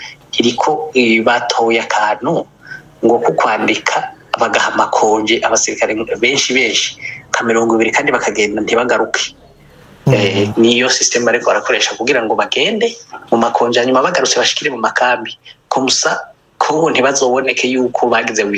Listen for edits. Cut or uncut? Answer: uncut